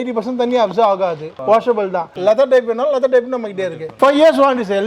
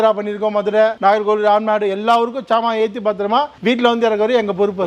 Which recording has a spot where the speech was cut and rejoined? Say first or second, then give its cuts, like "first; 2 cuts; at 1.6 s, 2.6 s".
first; 3 cuts; at 1.3 s, 2.1 s, 3.8 s